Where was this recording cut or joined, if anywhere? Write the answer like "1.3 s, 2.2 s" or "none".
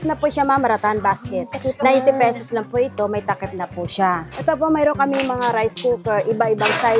4.3 s